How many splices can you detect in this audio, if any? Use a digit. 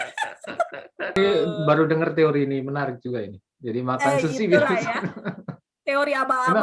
1